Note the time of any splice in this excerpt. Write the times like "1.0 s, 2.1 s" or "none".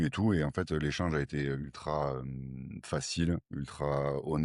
none

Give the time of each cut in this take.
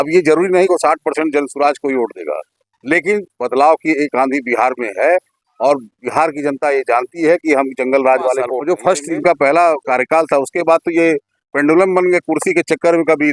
8.5 s

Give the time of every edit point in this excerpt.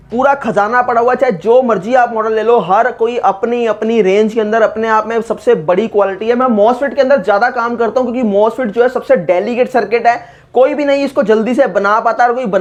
none

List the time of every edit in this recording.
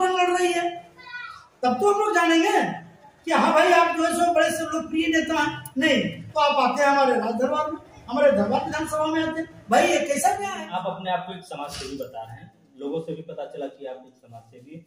10.5 s

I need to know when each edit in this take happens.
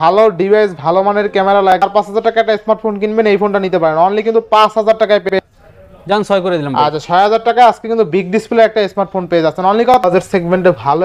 1.8 s, 5.3 s, 10.0 s

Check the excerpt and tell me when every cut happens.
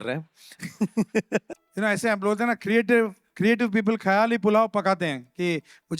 1.6 s

